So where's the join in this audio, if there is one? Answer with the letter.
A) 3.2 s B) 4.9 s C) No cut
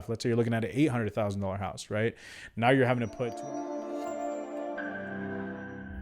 A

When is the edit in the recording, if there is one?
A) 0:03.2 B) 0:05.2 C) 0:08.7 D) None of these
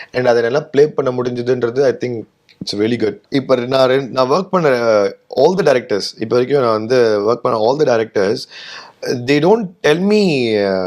A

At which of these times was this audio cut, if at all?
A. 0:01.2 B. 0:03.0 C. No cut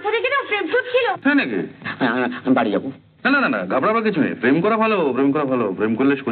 A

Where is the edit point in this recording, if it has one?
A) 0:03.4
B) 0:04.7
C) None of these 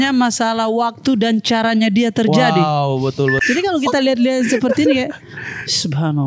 A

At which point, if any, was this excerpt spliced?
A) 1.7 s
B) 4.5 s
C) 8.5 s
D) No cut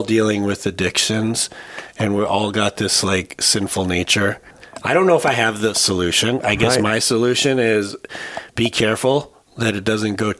B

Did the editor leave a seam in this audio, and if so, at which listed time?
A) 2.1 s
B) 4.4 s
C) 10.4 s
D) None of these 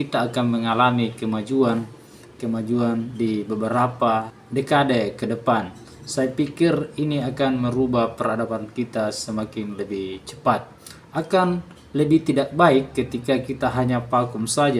B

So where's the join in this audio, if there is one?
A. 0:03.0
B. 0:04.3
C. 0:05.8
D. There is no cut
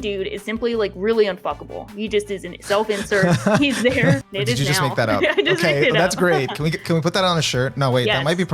B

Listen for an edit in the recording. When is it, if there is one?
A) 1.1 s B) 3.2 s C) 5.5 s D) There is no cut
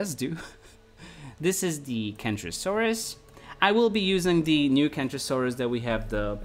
D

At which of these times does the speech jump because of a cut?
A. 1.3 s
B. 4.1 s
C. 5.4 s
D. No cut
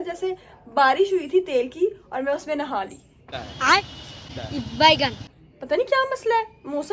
D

